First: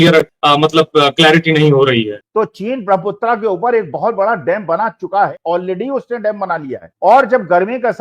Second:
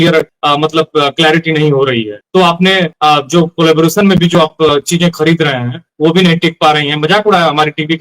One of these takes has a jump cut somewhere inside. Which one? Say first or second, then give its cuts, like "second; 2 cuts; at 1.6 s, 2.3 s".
first; 1 cut; at 2.2 s